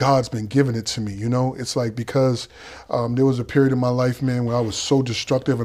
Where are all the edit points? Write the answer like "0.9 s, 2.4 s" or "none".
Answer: none